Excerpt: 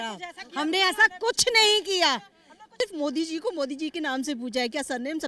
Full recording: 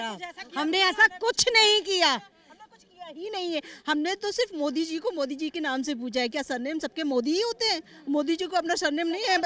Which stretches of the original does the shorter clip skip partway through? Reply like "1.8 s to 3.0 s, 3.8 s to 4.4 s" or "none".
2.8 s to 4.4 s